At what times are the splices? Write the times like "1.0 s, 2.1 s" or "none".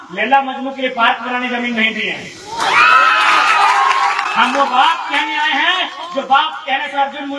4.3 s